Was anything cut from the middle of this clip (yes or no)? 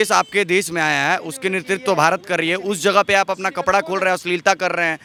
no